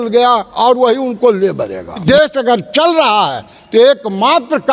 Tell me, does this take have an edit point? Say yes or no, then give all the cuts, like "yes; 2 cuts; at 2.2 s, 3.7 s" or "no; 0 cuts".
yes; 1 cut; at 2.0 s